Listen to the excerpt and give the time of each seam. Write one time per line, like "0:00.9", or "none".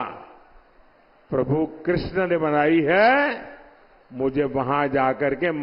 none